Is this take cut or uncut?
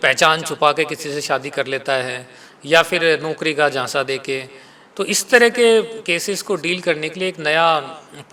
uncut